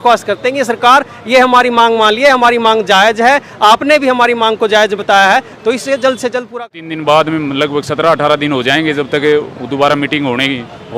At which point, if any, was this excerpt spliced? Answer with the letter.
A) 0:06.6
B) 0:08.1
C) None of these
A